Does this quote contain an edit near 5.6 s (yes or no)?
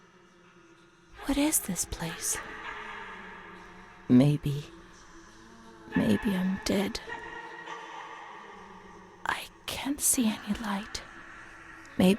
no